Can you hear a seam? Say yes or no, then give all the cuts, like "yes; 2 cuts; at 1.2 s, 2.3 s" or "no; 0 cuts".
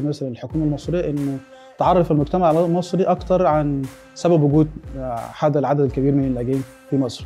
no; 0 cuts